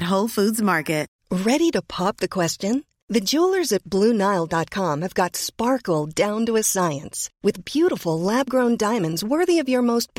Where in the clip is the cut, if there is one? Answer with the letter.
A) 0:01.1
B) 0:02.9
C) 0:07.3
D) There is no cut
A